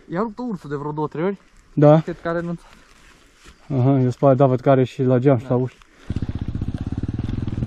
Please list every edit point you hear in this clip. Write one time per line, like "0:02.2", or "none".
0:06.0

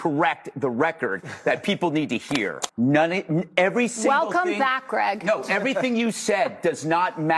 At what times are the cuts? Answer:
0:02.5

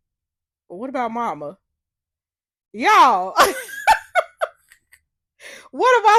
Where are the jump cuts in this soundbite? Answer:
none

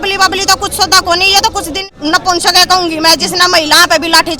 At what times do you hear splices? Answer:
0:01.8

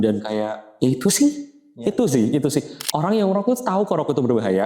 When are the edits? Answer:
0:02.8

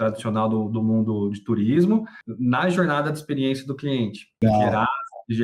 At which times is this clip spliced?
0:02.2
0:04.4

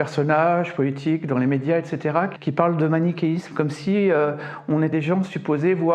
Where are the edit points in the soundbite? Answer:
0:02.3
0:04.9

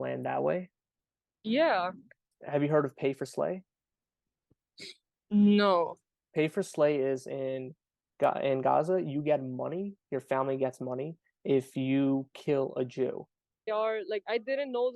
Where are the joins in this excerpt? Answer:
0:02.3
0:13.7

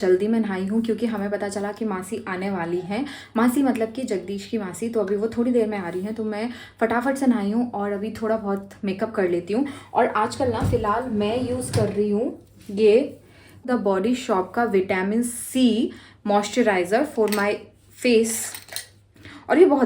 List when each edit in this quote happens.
none

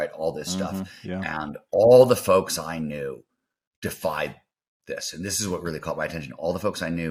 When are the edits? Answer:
none

